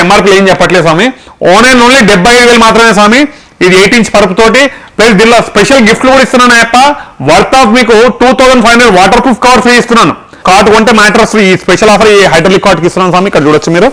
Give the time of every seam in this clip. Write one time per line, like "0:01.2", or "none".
0:10.4